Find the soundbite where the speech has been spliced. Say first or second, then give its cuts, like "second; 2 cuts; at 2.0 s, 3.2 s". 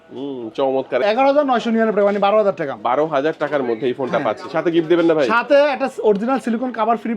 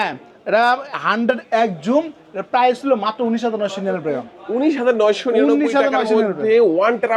first; 1 cut; at 1.0 s